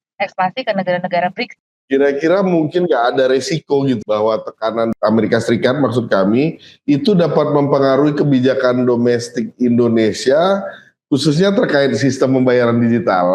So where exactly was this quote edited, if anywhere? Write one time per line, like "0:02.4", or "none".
0:01.5
0:04.0
0:04.9